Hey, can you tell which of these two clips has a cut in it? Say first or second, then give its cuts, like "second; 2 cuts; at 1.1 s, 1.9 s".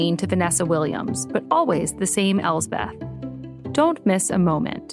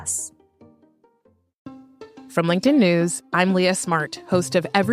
second; 1 cut; at 1.6 s